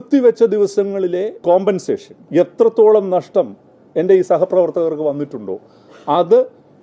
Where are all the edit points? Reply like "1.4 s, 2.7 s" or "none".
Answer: 1.4 s, 2.1 s